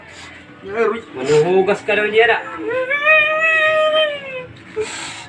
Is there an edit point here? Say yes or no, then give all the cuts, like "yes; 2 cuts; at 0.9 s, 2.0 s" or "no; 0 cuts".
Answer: no; 0 cuts